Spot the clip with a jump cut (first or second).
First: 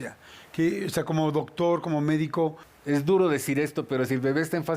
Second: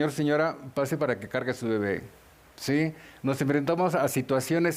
first